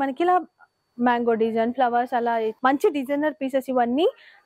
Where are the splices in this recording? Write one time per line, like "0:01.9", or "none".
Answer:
0:02.6